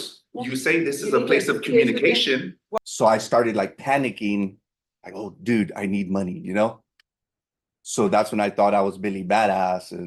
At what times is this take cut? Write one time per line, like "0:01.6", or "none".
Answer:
0:02.6